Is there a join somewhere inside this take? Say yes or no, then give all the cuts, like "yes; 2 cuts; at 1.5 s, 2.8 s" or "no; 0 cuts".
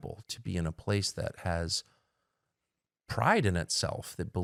no; 0 cuts